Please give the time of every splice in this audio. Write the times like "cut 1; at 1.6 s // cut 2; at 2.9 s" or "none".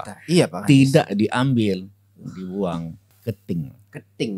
cut 1; at 3.1 s